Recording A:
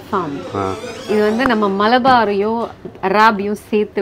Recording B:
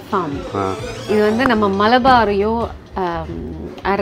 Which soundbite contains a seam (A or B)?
A